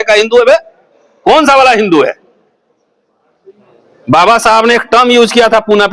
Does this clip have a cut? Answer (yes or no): no